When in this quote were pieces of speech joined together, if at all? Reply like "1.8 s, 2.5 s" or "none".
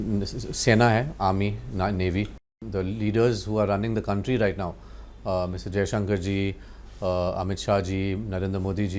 2.6 s